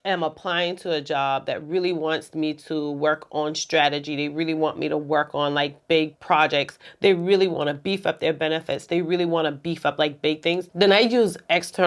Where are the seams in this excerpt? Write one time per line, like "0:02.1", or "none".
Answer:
none